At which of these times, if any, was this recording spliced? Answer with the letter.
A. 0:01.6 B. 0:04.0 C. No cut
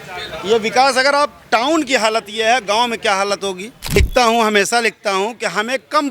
B